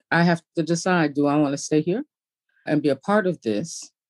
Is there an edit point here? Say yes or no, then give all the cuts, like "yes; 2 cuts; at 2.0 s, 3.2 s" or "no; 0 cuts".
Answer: yes; 1 cut; at 2.6 s